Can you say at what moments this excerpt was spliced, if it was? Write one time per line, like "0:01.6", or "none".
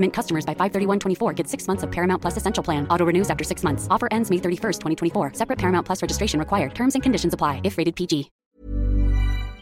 0:08.5

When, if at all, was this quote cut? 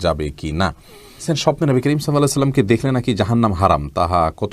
0:01.2

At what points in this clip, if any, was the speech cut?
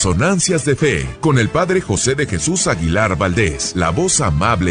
0:01.1
0:03.6

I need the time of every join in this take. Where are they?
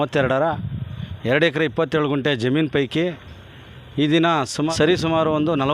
0:04.7

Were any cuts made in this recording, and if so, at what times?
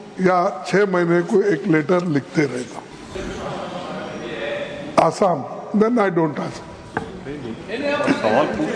0:03.1

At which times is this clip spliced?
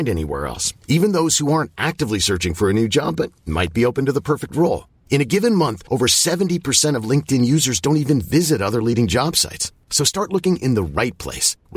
none

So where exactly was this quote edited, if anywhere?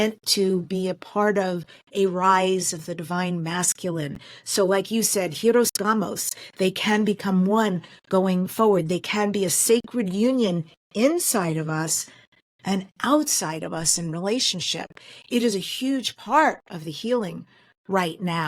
none

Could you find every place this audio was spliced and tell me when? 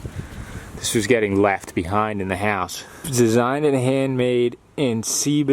0:03.1

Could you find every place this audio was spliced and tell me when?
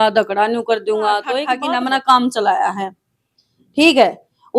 0:01.6

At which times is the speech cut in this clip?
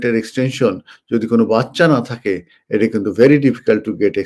none

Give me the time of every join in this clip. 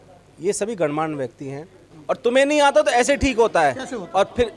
0:01.9

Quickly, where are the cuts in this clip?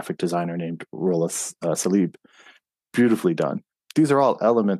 0:03.7

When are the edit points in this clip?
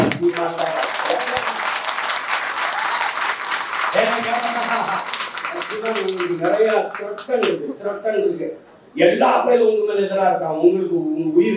none

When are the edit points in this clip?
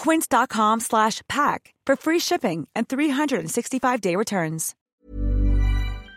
0:04.9

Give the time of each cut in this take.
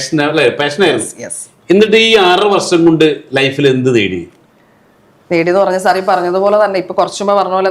none

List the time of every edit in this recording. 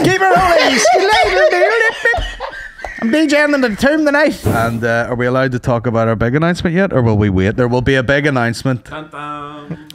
0:04.4

